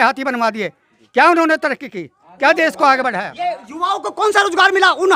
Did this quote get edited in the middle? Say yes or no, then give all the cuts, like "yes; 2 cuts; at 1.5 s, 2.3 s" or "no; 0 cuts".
no; 0 cuts